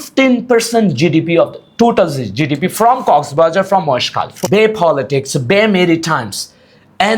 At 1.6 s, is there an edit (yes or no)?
no